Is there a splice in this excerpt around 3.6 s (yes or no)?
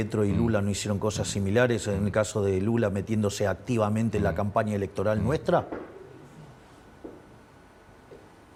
no